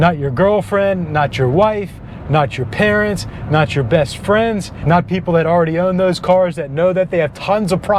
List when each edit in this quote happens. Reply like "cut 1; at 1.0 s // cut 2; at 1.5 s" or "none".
none